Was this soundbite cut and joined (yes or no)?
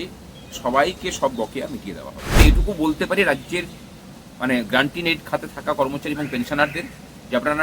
yes